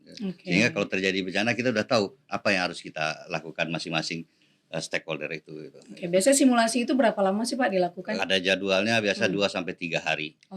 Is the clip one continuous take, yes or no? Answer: no